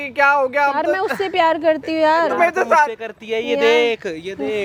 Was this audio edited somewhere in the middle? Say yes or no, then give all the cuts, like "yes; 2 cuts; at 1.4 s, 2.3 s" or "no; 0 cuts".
no; 0 cuts